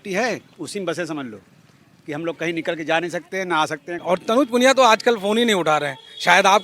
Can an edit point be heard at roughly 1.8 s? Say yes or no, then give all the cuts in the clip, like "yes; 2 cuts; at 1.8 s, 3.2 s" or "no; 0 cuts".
no; 1 cut; at 3.9 s